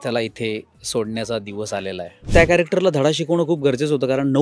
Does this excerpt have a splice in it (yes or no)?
yes